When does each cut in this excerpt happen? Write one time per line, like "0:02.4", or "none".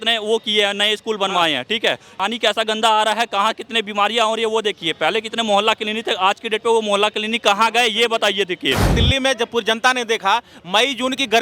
0:02.1
0:08.9